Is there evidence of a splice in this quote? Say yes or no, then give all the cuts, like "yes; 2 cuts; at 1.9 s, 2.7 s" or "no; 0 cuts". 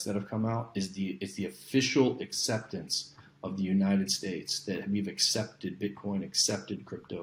no; 0 cuts